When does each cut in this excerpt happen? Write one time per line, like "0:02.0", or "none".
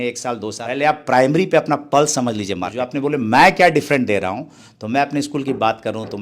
0:02.8